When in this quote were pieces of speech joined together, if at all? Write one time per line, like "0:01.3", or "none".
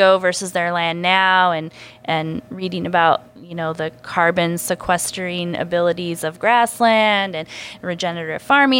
none